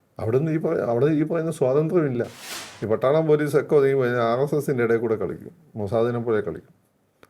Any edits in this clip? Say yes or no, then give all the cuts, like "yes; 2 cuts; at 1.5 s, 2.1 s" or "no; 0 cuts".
yes; 1 cut; at 2.4 s